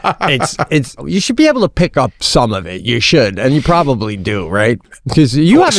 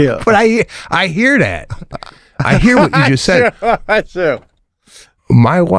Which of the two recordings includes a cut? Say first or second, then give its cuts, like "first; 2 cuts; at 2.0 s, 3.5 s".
first; 2 cuts; at 1.0 s, 4.8 s